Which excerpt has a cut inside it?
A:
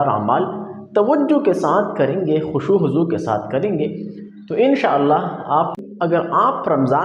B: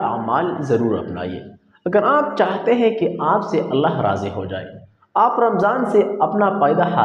A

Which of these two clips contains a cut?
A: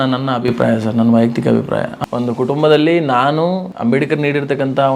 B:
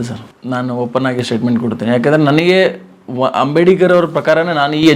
A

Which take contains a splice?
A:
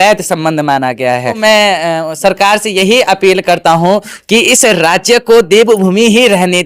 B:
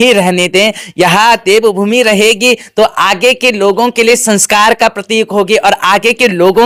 A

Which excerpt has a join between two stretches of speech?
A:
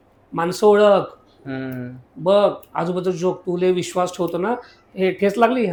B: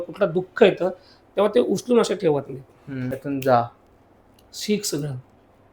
B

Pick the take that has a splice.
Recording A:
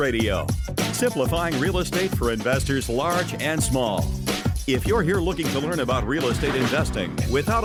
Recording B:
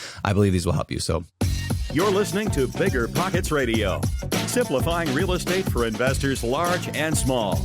B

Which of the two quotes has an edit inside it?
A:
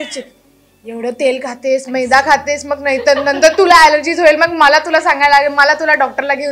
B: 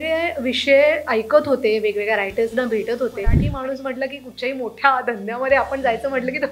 B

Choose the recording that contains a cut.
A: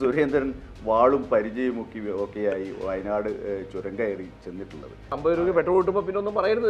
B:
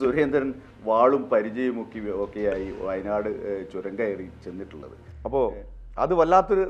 A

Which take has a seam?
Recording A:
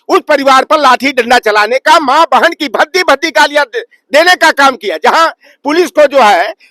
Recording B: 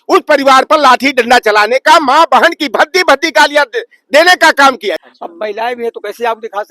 B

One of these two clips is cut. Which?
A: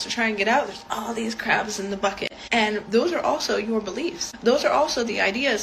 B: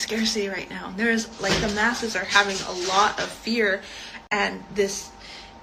A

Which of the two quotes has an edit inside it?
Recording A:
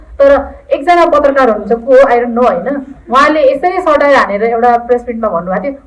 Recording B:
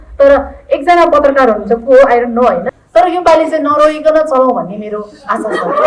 B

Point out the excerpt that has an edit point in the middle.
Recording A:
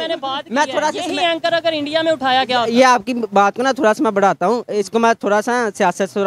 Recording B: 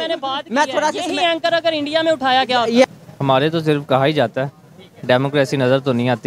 B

